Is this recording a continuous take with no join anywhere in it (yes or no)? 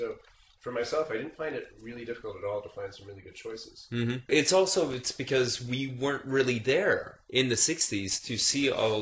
no